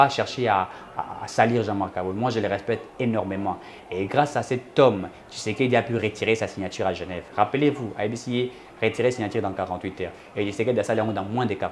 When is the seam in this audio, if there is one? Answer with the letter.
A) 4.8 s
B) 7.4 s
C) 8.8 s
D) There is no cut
D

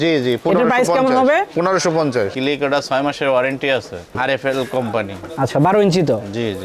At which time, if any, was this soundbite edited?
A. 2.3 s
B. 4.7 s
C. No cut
A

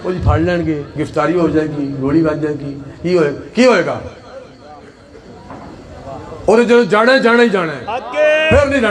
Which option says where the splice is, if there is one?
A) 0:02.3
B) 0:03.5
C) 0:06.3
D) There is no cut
D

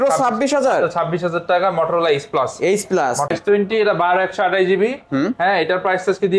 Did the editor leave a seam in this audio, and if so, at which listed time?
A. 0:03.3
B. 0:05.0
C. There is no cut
A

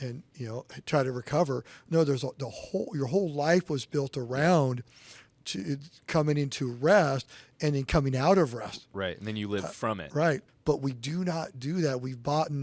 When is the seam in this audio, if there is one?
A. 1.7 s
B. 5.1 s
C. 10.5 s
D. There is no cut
C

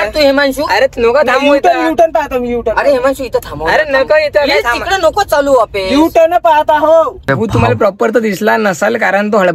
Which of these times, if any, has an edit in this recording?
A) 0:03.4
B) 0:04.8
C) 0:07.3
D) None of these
C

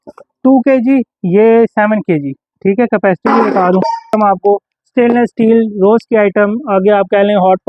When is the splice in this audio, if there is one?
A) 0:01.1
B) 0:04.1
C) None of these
B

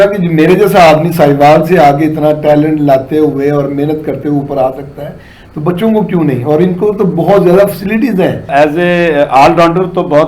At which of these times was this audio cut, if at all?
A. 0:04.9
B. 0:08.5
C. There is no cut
B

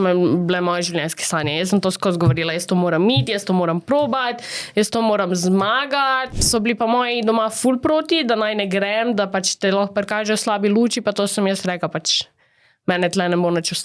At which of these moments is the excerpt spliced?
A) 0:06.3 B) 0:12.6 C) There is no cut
A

